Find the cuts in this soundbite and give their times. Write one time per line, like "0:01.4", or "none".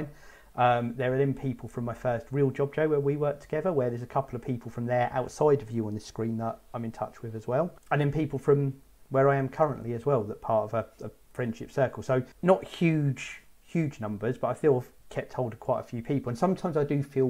0:07.8
0:12.3